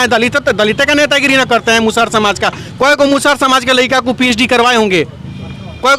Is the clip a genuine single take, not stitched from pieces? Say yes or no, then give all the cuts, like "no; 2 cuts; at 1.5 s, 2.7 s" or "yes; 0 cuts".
yes; 0 cuts